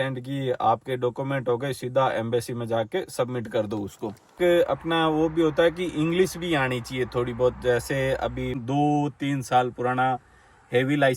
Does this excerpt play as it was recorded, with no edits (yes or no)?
no